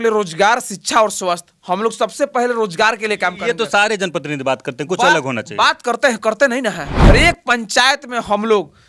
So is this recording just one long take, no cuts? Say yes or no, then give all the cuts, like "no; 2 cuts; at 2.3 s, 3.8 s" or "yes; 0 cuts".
no; 1 cut; at 7.0 s